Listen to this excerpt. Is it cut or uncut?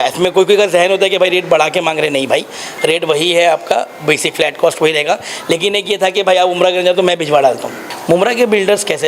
cut